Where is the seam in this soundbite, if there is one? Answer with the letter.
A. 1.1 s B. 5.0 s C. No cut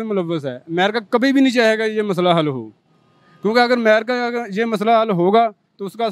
C